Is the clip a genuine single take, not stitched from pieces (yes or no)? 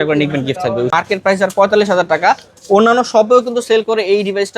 no